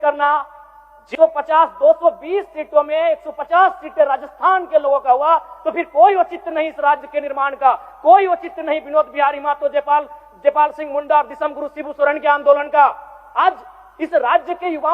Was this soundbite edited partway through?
yes; 1 cut; at 1.1 s

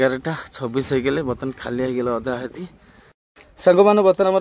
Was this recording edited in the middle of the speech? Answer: yes; 1 cut; at 3.3 s

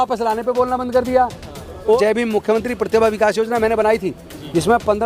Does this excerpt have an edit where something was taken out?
yes; 1 cut; at 2.0 s

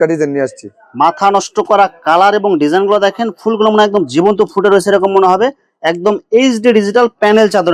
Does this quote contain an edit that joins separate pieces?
no; 0 cuts

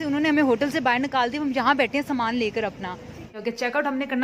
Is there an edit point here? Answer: yes; 1 cut; at 3.3 s

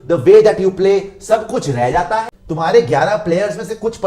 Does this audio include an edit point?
yes; 1 cut; at 2.4 s

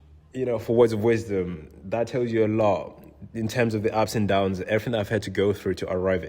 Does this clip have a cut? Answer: no; 0 cuts

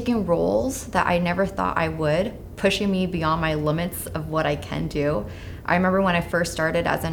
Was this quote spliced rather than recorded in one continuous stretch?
no; 0 cuts

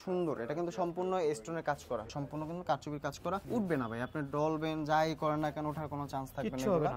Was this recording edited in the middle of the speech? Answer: yes; 2 cuts; at 2.2 s, 3.4 s

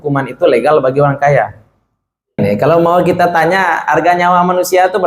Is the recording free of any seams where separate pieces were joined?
no; 1 cut; at 2.4 s

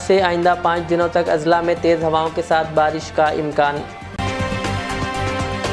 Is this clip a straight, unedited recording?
yes; 0 cuts

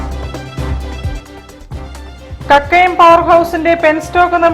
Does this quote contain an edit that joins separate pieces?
no; 0 cuts

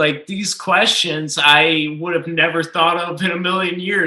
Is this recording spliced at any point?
no; 0 cuts

